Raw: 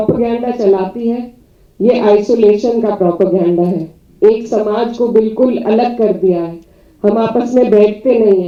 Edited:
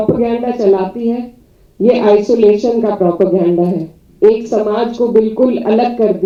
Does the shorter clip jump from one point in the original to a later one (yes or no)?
no